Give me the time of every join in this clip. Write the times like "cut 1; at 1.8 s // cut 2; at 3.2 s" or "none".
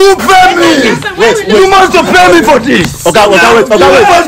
none